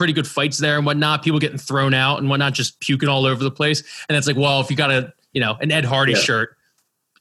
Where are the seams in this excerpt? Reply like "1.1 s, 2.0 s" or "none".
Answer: none

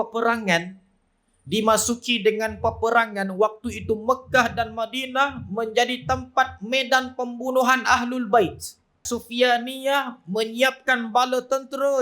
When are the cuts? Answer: 9.0 s

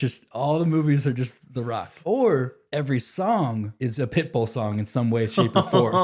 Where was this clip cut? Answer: 1.9 s, 2.6 s, 3.7 s

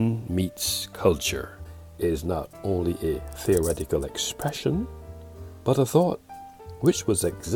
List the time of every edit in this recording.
1.6 s

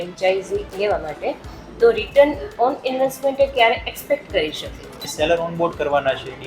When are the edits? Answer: 5.1 s

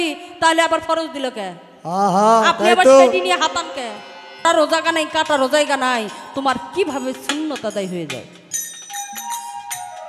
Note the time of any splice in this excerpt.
4.4 s

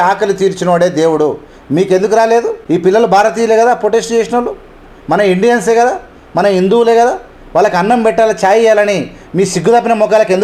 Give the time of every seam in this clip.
none

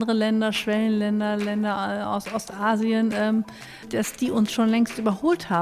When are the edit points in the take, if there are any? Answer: 3.9 s

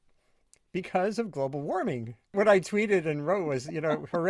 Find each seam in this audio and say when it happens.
2.3 s

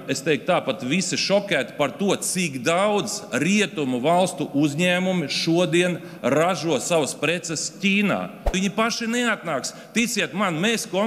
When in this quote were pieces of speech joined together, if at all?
8.5 s

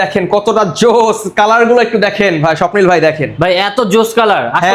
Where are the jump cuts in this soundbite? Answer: none

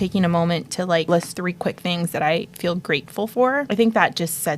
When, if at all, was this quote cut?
1.2 s, 3.7 s

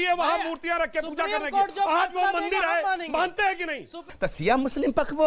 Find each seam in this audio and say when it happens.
4.1 s

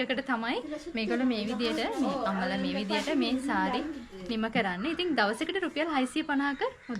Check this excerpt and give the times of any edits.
none

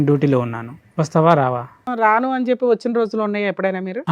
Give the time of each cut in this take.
1.9 s

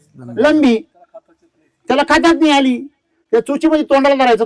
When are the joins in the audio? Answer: none

